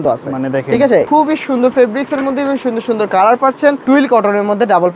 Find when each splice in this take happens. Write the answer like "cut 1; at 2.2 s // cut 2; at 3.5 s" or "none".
cut 1; at 1.1 s // cut 2; at 3.8 s